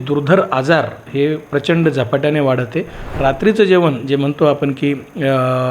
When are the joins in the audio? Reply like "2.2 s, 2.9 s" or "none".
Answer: 3.0 s